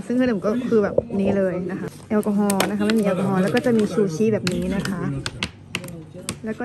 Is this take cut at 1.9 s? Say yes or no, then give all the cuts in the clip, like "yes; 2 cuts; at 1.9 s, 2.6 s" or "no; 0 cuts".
yes; 2 cuts; at 1.9 s, 5.4 s